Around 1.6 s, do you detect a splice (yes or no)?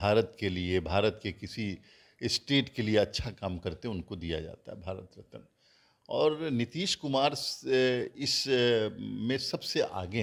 no